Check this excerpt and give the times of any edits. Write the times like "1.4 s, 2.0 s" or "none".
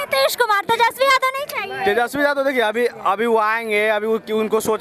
none

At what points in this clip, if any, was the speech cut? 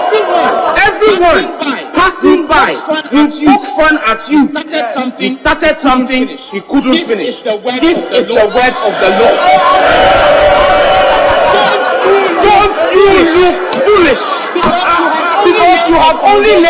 none

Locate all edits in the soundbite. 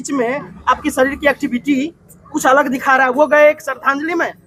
none

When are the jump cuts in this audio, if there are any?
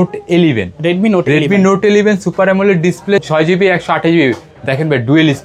3.2 s

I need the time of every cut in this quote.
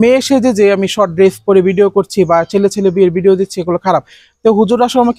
none

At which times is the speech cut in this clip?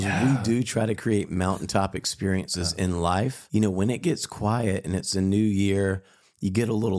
3.4 s

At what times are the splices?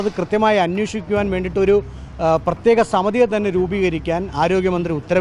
none

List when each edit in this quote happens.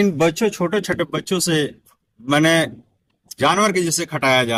none

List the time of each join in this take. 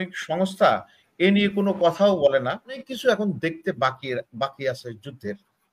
2.9 s

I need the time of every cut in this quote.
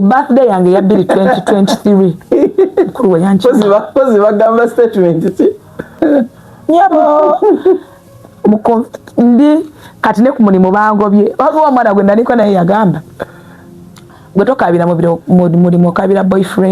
6.0 s

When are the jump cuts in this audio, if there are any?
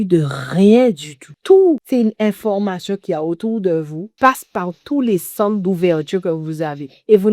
1.3 s, 1.8 s, 4.0 s

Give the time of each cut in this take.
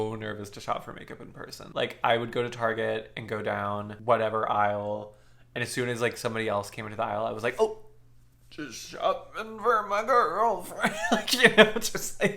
1.6 s

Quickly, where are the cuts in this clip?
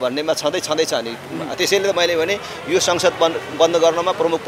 none

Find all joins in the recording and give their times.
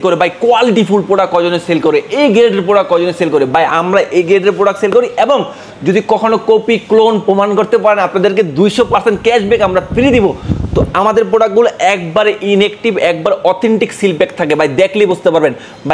none

